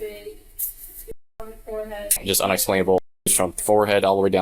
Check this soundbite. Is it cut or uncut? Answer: cut